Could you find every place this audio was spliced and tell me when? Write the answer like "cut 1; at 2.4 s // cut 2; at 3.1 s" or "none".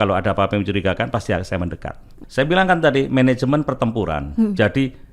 cut 1; at 2.2 s